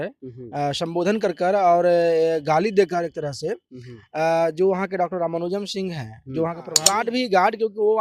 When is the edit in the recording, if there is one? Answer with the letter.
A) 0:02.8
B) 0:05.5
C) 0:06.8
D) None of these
C